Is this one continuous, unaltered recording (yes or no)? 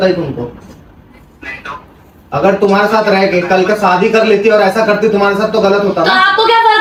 yes